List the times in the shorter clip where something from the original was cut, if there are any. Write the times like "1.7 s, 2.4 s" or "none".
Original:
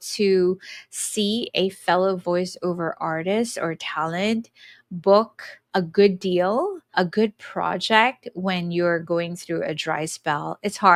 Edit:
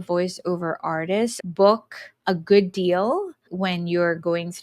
1.4 s, 3.4 s

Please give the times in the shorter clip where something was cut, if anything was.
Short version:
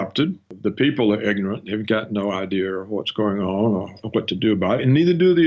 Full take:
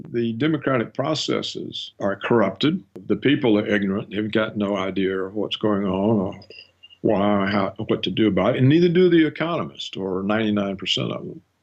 4.0 s

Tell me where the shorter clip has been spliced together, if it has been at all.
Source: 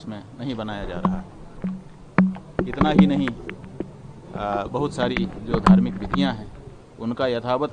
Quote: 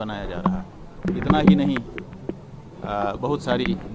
1.0 s

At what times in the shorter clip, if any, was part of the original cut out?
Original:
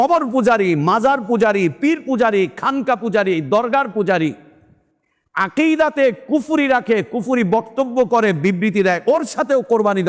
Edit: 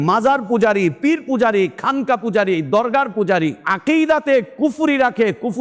3.7 s

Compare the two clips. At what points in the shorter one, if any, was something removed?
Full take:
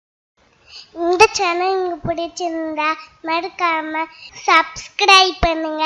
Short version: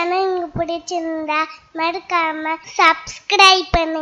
2.6 s

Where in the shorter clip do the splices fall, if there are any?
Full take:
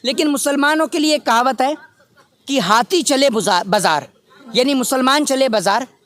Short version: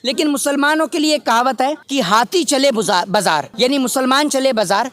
1.8 s, 3.5 s

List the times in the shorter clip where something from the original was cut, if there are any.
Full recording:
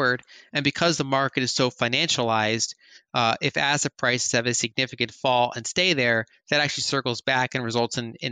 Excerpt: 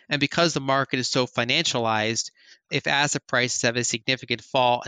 2.7 s

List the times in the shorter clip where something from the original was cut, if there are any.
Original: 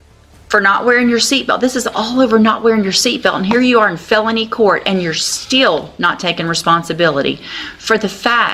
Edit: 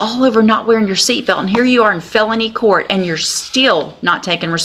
none

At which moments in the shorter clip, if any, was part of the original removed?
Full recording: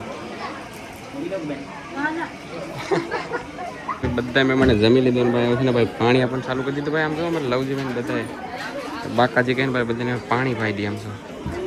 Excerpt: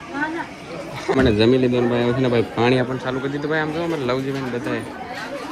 1.1 s

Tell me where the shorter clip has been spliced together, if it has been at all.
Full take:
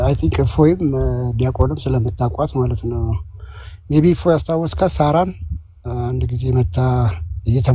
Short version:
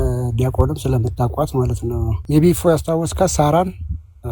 2.1 s

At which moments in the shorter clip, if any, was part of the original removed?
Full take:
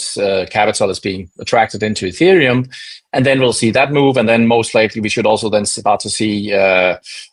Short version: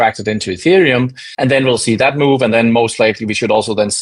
1.2 s

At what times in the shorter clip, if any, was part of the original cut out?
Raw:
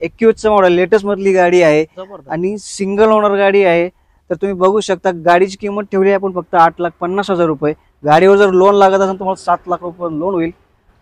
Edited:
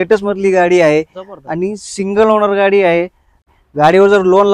3.5 s

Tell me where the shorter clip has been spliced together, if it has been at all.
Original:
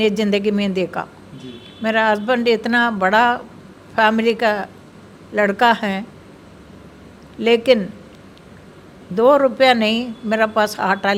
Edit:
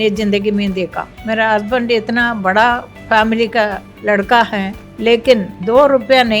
1.1 s, 2.9 s, 3.9 s, 4.8 s, 5.5 s

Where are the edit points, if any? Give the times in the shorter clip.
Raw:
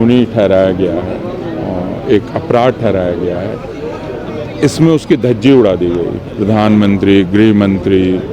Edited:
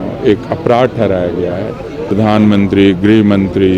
2.0 s

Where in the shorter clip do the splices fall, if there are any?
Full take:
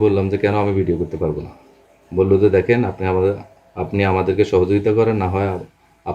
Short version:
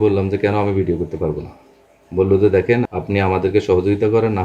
2.9 s

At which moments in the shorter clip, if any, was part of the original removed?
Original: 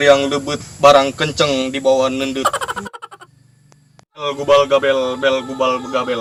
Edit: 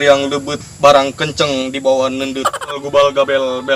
2.7 s

